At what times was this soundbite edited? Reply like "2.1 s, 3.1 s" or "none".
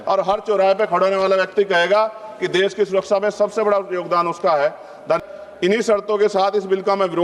5.2 s

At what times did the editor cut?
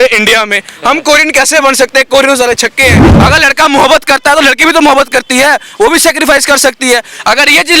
3.1 s

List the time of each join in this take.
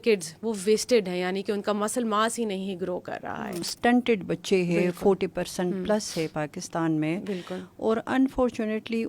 3.7 s

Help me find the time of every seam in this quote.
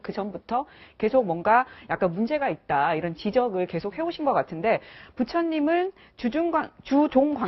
none

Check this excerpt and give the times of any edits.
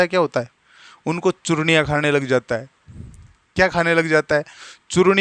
none

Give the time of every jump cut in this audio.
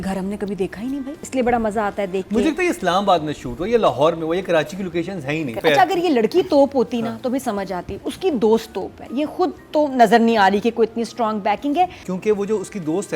1.2 s, 5.6 s, 12.0 s

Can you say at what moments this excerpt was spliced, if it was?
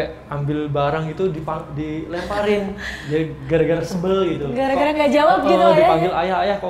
none

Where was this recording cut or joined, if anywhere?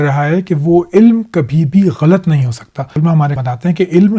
3.0 s

